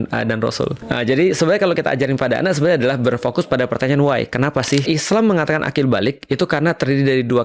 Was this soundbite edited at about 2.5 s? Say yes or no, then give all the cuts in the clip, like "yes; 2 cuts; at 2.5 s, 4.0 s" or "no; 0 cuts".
no; 2 cuts; at 1.0 s, 4.8 s